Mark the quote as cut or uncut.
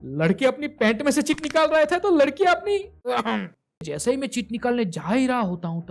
cut